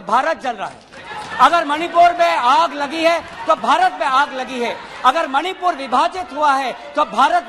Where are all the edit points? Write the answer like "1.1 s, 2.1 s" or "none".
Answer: none